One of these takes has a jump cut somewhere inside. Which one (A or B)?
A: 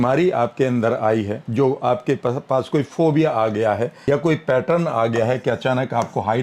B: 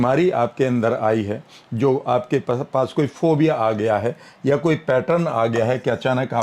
A